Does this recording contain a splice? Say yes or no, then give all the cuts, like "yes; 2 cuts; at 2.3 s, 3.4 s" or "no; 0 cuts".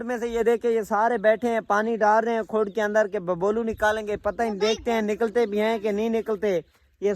no; 0 cuts